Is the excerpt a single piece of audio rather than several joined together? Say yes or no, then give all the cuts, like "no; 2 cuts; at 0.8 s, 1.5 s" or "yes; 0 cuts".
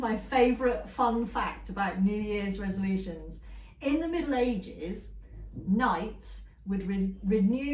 yes; 0 cuts